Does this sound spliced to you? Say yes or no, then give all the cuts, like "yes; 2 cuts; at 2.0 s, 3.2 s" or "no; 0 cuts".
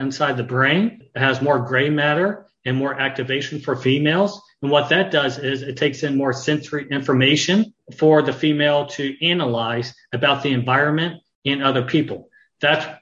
yes; 2 cuts; at 1.1 s, 7.8 s